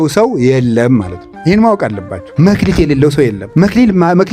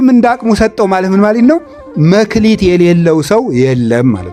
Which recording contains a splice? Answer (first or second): first